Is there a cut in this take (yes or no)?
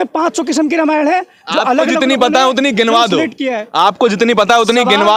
no